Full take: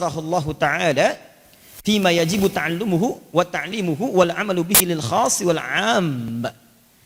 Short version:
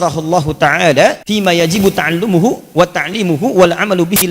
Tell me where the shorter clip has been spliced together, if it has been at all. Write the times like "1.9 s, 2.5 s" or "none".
1.2 s